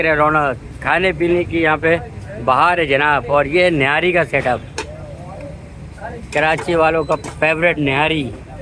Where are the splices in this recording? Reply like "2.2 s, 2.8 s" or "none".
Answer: none